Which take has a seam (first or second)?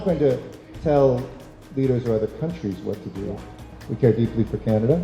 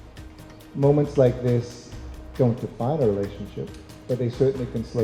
first